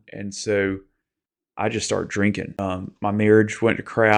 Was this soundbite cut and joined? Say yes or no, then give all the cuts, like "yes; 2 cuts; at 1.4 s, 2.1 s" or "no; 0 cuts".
yes; 1 cut; at 2.6 s